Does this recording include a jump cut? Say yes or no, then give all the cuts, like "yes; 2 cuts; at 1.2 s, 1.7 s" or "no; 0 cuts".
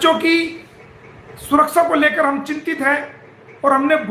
no; 0 cuts